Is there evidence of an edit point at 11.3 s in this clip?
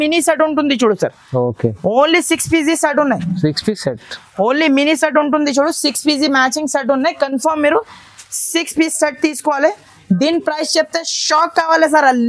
no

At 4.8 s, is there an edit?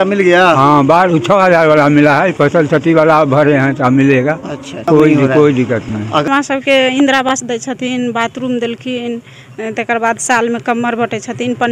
yes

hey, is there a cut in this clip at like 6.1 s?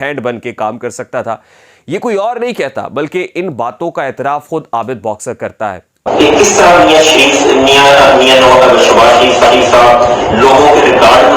yes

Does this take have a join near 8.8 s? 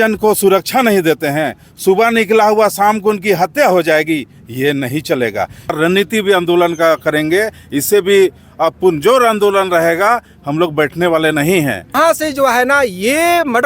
no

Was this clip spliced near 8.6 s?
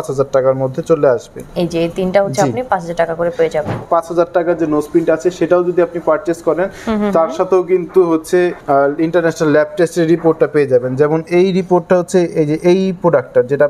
yes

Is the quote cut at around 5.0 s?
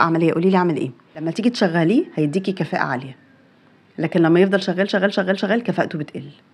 no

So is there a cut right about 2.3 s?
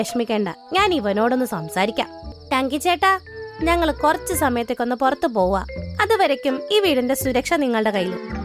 yes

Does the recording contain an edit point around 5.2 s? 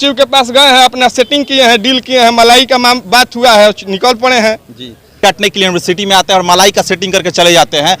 yes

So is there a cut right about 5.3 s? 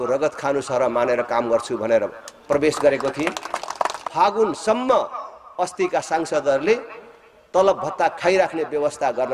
no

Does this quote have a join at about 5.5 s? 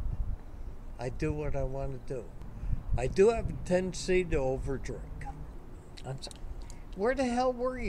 yes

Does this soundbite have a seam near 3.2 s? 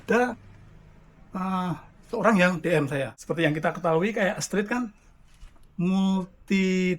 yes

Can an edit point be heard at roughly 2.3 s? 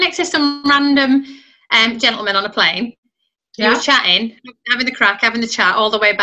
no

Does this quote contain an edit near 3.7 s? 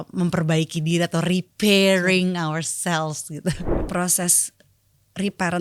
yes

